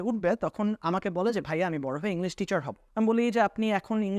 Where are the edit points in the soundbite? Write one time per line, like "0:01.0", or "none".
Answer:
0:02.8